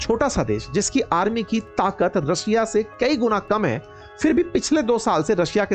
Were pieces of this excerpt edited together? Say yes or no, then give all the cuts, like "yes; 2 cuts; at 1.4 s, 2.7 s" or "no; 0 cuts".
no; 0 cuts